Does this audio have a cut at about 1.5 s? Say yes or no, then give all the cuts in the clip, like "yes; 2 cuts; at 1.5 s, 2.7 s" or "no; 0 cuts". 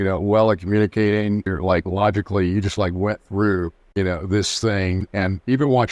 yes; 3 cuts; at 1.5 s, 3.8 s, 5.0 s